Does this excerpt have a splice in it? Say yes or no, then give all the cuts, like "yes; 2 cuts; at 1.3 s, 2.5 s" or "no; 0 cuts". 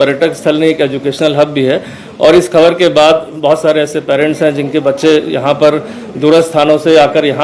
no; 0 cuts